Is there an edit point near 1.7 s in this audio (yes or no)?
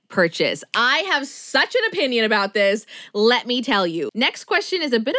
no